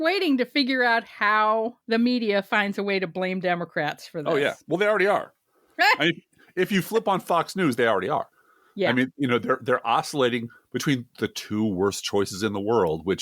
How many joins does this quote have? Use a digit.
1